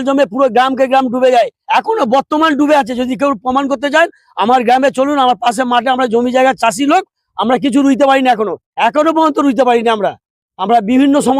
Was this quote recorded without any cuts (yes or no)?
yes